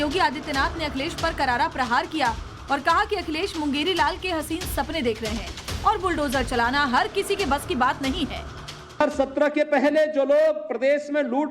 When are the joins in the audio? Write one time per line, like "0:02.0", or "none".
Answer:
0:00.9